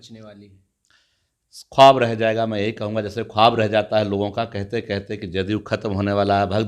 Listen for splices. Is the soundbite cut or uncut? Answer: uncut